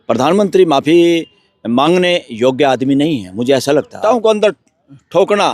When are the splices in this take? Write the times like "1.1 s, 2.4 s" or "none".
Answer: 4.0 s